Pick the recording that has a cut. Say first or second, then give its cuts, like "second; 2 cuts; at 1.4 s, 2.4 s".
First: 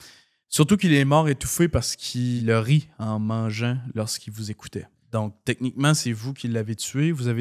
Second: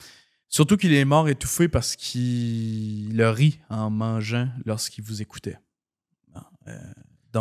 first; 2 cuts; at 2.4 s, 5.0 s